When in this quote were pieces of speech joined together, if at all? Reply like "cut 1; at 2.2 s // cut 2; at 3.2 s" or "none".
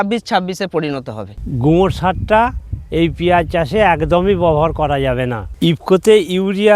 cut 1; at 1.3 s // cut 2; at 5.4 s